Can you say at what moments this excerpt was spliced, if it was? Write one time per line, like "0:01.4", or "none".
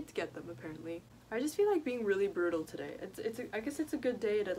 0:01.0

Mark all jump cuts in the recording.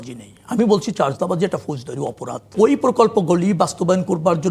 0:02.5

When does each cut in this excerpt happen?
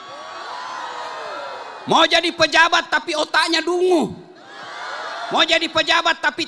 none

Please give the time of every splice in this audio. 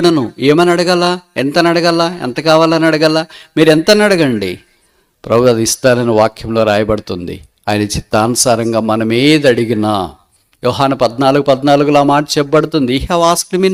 none

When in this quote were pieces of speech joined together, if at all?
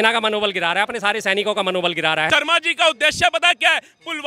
0:02.3

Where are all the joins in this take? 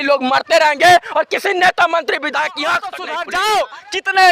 0:03.2

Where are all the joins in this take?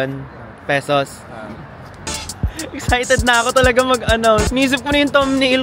0:02.1
0:04.5

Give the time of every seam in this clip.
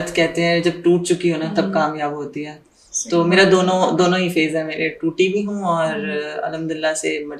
none

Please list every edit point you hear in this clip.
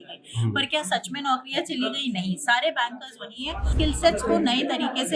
0:03.7

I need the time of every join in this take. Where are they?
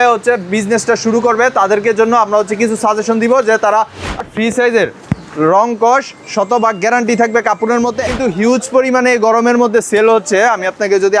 0:04.2
0:08.1

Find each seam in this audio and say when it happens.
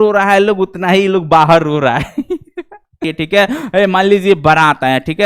0:03.0

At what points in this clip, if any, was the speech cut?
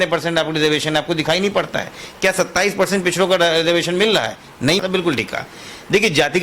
0:04.6

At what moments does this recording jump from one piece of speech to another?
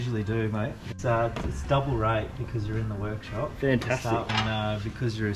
0:00.9
0:04.3

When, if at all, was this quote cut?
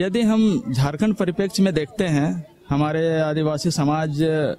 none

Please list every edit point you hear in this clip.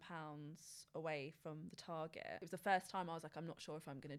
0:02.4

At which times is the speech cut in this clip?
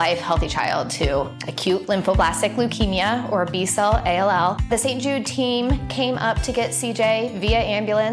none

